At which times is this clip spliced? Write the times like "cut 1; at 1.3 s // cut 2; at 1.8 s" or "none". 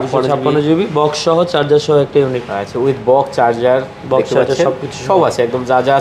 none